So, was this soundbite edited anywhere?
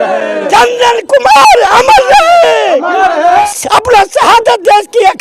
yes; 1 cut; at 3.3 s

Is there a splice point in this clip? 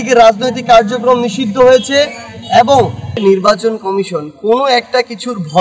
yes; 1 cut; at 3.1 s

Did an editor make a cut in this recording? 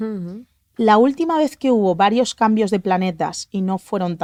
no; 0 cuts

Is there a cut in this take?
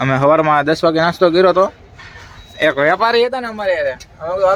no; 0 cuts

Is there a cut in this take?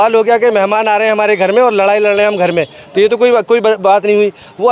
no; 0 cuts

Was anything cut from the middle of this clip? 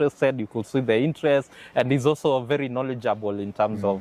no; 0 cuts

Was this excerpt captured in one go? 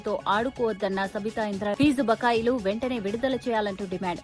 yes; 0 cuts

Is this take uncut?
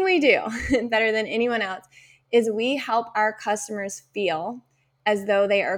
yes; 0 cuts

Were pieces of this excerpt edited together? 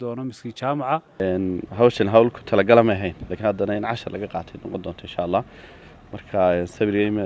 yes; 1 cut; at 1.1 s

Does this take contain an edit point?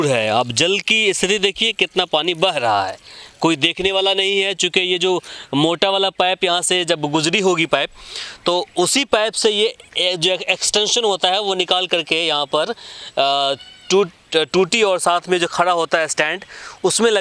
no; 0 cuts

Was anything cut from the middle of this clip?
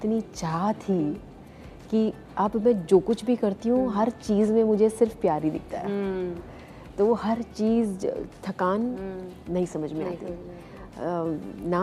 no; 0 cuts

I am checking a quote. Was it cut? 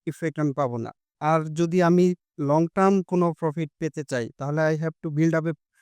yes; 2 cuts; at 1.0 s, 2.3 s

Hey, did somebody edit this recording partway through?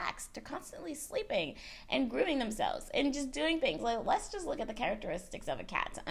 no; 0 cuts

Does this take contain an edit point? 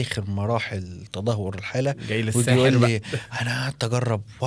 no; 0 cuts

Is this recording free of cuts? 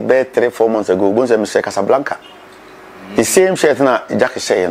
yes; 0 cuts

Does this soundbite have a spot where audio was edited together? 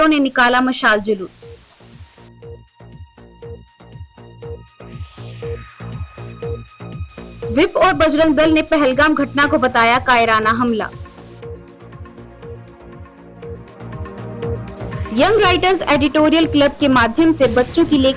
no; 0 cuts

